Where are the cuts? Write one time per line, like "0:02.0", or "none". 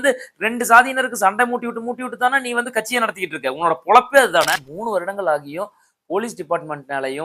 0:04.7